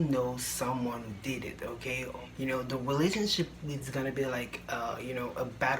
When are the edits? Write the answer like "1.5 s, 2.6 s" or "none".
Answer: 2.0 s